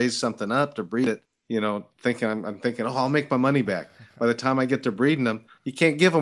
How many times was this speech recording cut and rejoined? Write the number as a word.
one